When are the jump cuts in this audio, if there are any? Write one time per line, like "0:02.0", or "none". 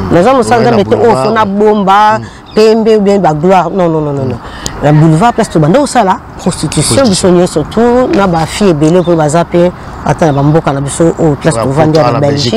none